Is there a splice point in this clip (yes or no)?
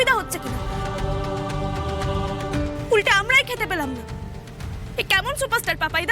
no